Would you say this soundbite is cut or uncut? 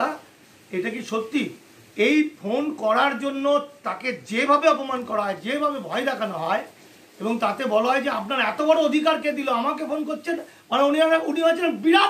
uncut